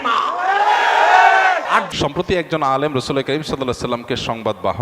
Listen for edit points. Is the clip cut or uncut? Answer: cut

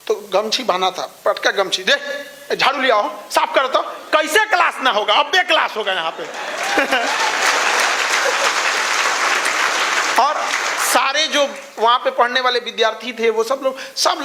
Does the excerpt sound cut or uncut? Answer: uncut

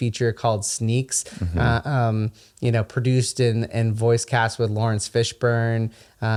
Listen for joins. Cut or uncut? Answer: uncut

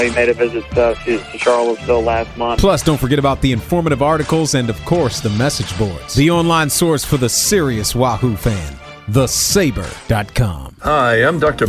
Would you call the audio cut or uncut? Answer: cut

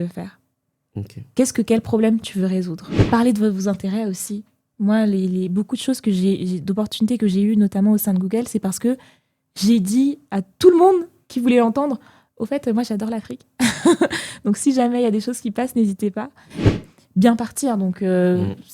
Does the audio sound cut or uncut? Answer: cut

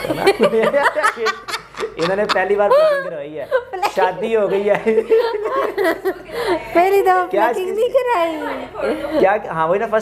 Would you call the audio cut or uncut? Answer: uncut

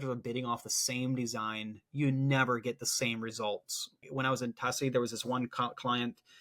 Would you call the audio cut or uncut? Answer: cut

